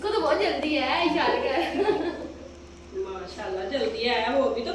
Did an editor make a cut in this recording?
no; 0 cuts

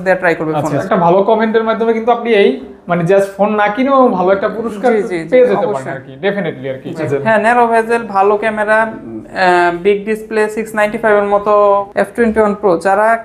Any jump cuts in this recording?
yes; 3 cuts; at 0.8 s, 7.1 s, 11.9 s

